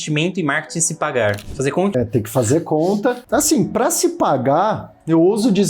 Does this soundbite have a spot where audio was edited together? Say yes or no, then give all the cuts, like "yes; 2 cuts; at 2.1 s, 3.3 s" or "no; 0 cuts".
yes; 2 cuts; at 1.9 s, 3.2 s